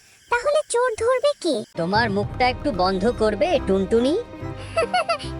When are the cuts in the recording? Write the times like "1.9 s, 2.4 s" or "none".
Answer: 1.7 s